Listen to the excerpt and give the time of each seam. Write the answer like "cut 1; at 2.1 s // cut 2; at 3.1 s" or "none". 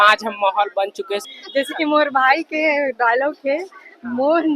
cut 1; at 1.2 s